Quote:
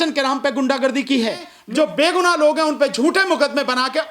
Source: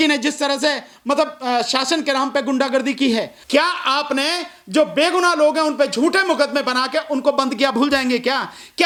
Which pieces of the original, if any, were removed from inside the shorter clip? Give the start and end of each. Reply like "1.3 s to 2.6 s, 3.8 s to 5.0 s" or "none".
3.4 s to 4.4 s